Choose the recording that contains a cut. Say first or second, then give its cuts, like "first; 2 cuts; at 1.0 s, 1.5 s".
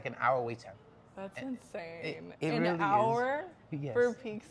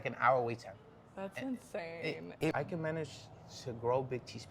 second; 1 cut; at 2.5 s